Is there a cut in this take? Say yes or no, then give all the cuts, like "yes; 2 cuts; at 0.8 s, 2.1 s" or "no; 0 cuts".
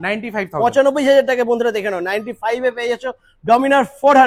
no; 0 cuts